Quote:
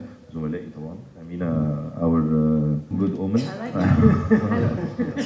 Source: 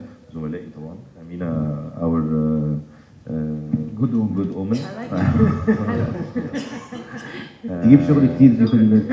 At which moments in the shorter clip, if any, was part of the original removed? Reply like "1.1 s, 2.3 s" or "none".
3.0 s